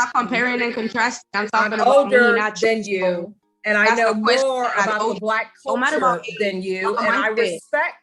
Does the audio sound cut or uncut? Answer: uncut